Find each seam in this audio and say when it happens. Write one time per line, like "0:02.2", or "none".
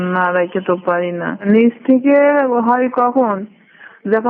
0:01.4